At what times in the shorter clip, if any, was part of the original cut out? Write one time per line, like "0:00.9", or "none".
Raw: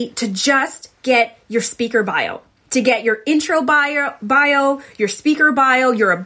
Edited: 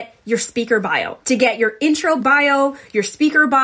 0:01.1
0:02.2